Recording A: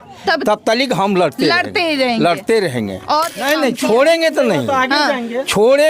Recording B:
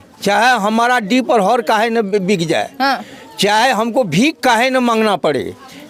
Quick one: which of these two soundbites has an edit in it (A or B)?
A